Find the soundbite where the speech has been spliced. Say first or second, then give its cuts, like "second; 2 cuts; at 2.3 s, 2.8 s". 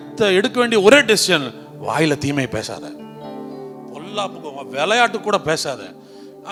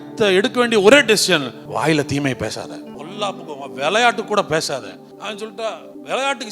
second; 3 cuts; at 1.6 s, 2.9 s, 5.4 s